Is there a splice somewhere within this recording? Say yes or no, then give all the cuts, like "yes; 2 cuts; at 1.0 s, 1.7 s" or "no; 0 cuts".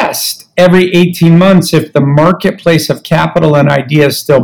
no; 0 cuts